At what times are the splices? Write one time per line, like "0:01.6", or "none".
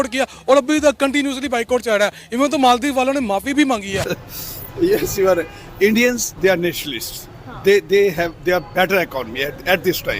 0:04.2